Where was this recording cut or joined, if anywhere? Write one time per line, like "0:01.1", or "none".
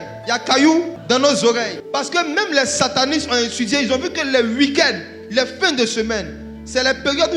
0:01.0
0:01.8